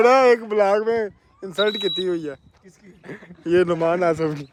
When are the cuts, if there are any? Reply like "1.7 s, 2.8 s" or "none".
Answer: none